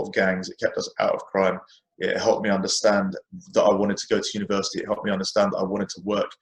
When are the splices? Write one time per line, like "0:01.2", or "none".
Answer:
none